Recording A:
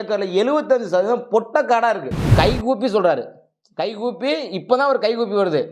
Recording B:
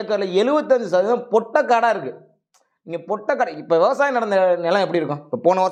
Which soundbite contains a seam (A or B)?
A